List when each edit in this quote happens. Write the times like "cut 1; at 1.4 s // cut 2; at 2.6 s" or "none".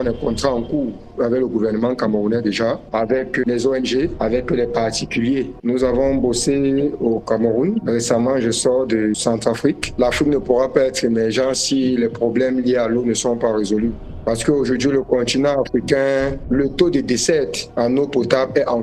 cut 1; at 5.6 s // cut 2; at 9.8 s